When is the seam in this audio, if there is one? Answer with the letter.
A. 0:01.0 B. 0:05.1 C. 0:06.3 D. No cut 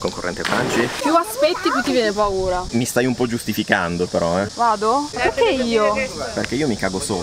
B